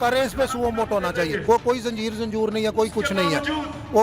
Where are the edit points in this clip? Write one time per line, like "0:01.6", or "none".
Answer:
0:01.4